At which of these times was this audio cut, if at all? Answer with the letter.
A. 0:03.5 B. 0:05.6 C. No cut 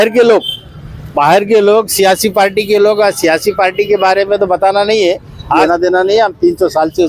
B